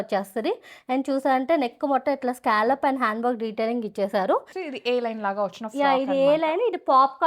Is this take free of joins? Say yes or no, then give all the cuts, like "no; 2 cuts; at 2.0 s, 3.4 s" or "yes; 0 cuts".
no; 1 cut; at 4.5 s